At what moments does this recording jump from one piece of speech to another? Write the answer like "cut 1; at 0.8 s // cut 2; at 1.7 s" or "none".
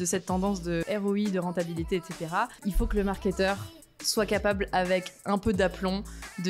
cut 1; at 0.8 s // cut 2; at 2.6 s